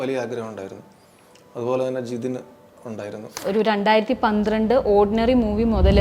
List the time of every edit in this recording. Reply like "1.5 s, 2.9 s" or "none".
3.4 s

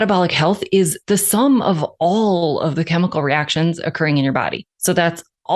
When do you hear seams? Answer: 1.0 s, 4.7 s

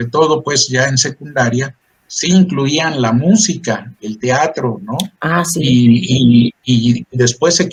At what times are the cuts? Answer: none

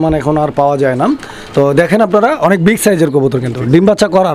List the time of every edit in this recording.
none

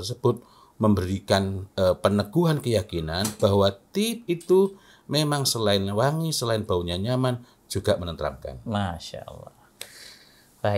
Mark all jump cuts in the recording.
none

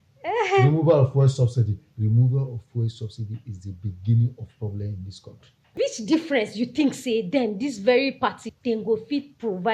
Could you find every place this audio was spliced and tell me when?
1.8 s, 5.7 s, 8.4 s

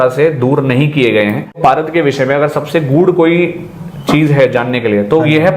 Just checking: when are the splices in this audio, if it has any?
1.6 s

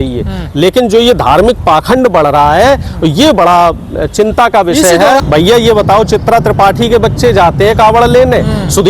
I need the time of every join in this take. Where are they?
5.2 s

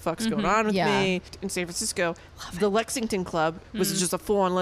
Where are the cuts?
1.3 s, 3.6 s

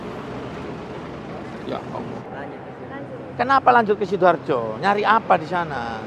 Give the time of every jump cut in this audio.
2.2 s

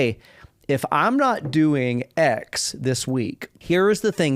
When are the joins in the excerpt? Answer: 3.5 s

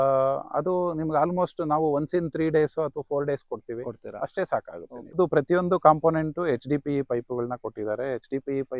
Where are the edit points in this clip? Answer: 5.1 s

